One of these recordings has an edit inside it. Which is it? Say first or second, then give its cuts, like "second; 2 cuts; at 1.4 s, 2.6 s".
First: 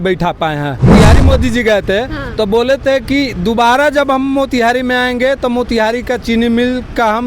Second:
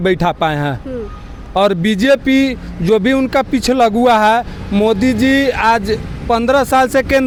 first; 1 cut; at 0.9 s